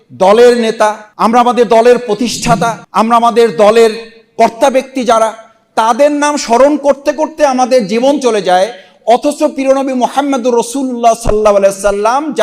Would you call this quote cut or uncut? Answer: cut